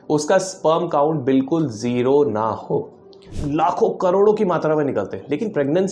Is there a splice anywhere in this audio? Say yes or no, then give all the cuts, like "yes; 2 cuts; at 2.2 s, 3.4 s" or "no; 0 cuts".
yes; 1 cut; at 3.3 s